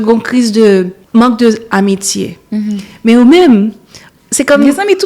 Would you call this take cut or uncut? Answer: cut